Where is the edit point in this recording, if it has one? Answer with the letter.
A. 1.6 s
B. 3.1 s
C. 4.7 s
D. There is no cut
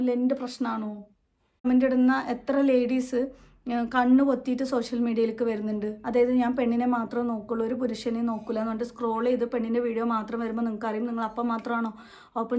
A